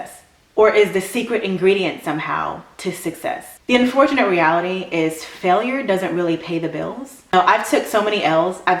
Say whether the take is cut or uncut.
cut